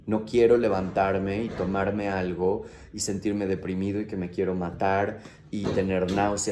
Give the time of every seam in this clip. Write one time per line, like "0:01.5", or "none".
none